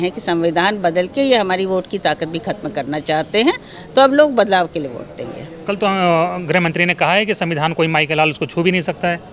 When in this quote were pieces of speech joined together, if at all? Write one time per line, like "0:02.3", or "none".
none